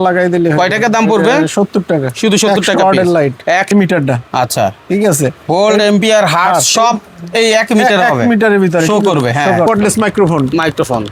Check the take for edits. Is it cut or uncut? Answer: cut